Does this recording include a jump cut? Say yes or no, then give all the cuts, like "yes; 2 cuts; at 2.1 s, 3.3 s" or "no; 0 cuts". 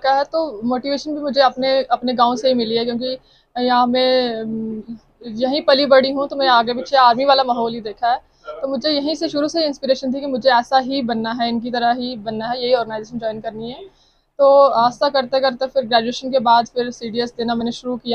no; 0 cuts